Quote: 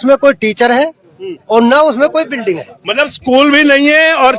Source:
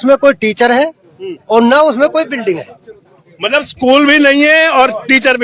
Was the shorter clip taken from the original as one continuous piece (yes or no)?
no